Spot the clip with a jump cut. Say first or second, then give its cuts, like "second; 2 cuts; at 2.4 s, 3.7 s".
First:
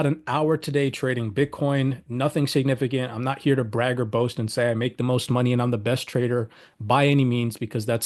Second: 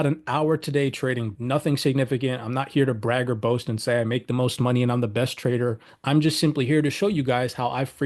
second; 2 cuts; at 1.3 s, 5.9 s